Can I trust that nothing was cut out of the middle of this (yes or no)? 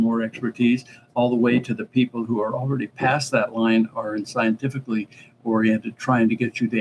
yes